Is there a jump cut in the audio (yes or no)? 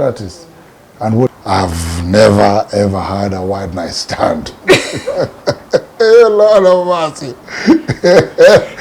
yes